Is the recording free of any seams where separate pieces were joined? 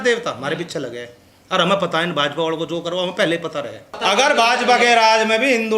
no; 1 cut; at 3.9 s

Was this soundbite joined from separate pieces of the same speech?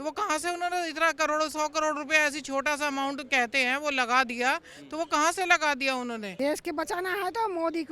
yes; 1 cut; at 6.3 s

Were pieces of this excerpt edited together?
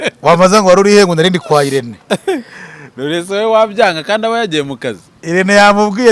no; 0 cuts

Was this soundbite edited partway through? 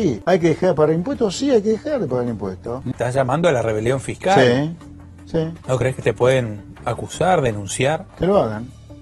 yes; 3 cuts; at 2.7 s, 5.6 s, 8.1 s

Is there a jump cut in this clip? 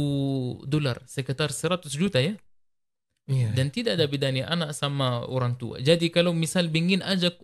no; 0 cuts

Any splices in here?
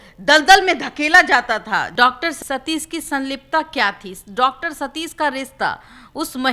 yes; 1 cut; at 1.9 s

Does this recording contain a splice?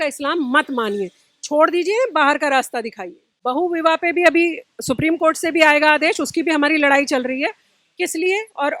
no; 0 cuts

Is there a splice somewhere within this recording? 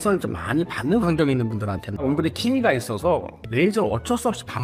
yes; 1 cut; at 1.9 s

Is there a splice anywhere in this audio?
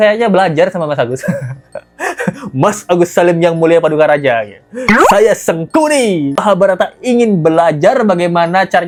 no; 0 cuts

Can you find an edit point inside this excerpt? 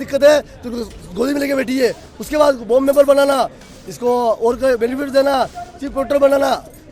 no; 0 cuts

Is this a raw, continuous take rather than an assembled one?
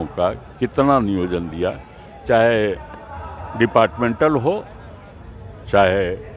yes; 0 cuts

